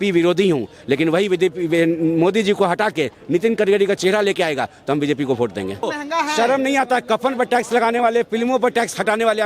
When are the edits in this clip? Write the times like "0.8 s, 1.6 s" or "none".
5.9 s